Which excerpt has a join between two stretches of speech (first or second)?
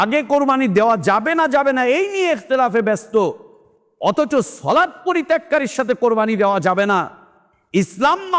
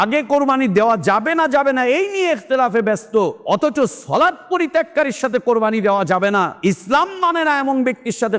second